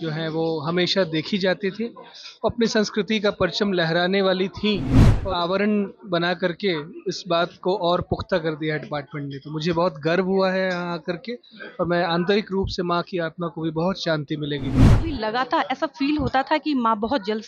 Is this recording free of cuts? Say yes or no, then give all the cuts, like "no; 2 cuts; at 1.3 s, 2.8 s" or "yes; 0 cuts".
no; 2 cuts; at 5.2 s, 15.0 s